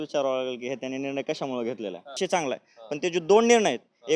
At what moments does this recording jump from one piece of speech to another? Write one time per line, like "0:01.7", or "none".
0:02.1